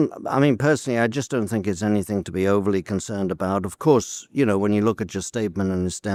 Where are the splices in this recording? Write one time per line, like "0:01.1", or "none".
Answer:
none